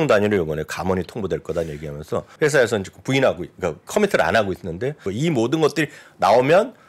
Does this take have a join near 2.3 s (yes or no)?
yes